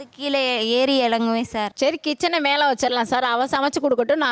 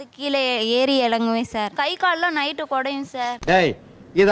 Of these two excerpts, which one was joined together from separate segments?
first; 1 cut; at 1.7 s

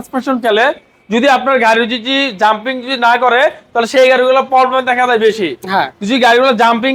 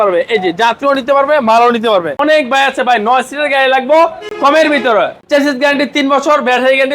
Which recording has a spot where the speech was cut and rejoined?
second; 3 cuts; at 2.2 s, 4.2 s, 5.2 s

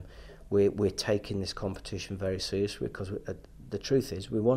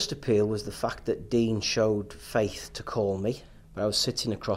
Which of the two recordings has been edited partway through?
second; 1 cut; at 3.5 s

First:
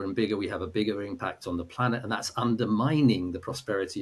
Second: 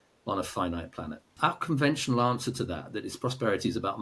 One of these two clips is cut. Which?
second; 1 cut; at 1.2 s

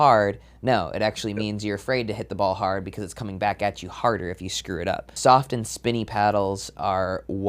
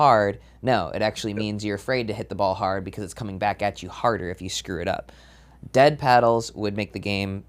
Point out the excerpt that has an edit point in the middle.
first; 1 cut; at 5.1 s

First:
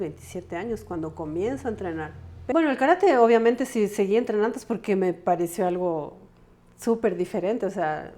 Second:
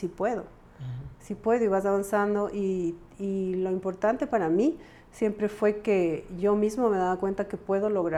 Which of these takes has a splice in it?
first; 1 cut; at 2.5 s

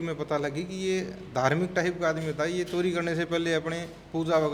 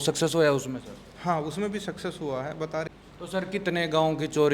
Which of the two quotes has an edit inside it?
second; 1 cut; at 2.9 s

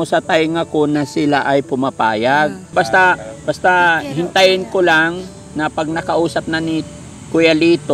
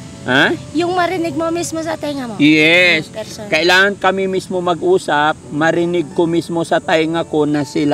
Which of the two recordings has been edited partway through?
first; 1 cut; at 2.7 s

